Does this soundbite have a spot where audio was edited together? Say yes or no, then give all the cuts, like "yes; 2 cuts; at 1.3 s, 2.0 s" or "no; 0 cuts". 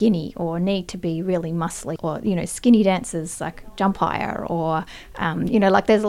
yes; 1 cut; at 1.9 s